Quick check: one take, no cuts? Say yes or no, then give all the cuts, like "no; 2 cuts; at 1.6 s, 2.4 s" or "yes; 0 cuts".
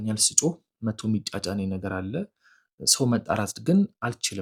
yes; 0 cuts